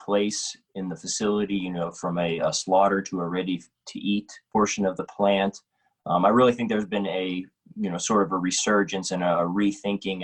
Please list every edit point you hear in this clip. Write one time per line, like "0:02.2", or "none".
0:04.5